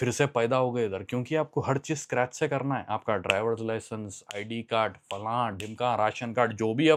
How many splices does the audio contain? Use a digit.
0